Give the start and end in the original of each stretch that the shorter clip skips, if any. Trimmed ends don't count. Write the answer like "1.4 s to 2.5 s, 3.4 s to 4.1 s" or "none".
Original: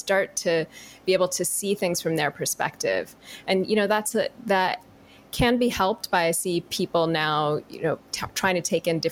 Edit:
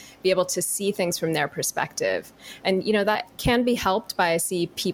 4.1 s to 5.2 s